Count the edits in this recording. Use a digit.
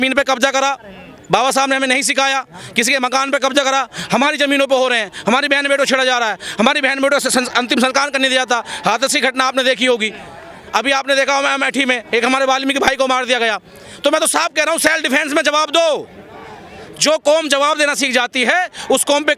0